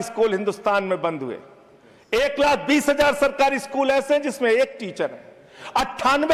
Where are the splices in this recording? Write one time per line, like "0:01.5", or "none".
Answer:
none